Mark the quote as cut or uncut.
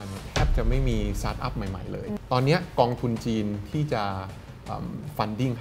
cut